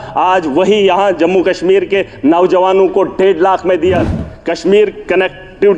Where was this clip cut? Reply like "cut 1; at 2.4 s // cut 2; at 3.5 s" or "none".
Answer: cut 1; at 4.0 s